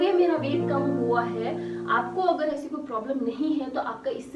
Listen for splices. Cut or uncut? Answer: uncut